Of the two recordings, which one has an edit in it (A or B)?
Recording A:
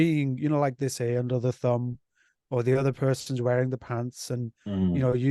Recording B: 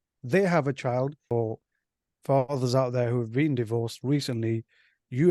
B